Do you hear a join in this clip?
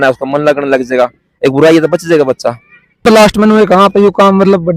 yes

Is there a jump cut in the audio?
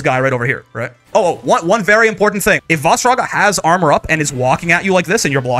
yes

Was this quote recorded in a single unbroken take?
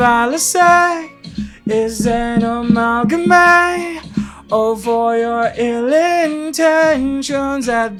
yes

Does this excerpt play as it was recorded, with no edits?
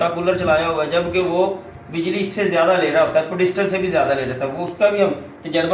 yes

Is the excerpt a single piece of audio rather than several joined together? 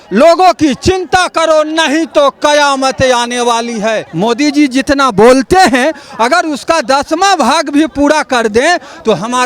no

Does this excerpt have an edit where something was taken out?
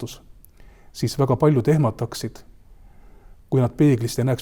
no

